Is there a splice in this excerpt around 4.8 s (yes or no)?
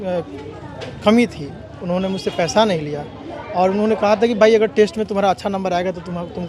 no